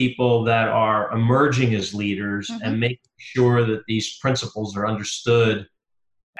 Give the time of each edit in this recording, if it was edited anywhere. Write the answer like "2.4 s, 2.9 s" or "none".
none